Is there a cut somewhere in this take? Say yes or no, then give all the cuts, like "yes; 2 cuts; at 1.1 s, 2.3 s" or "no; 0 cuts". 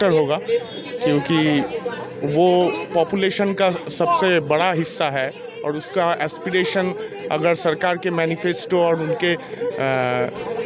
no; 0 cuts